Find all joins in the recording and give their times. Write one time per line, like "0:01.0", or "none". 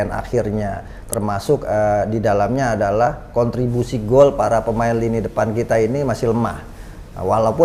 none

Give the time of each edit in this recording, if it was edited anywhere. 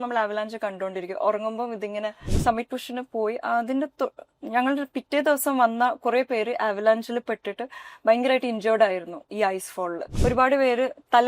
0:02.3
0:10.0

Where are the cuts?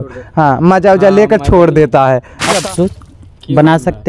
0:02.6

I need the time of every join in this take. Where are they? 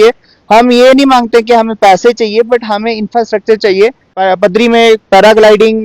0:04.1

